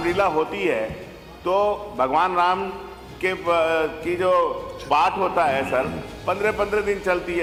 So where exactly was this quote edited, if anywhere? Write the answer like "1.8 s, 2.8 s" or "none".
none